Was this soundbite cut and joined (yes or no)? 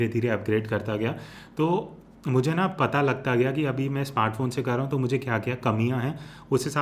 no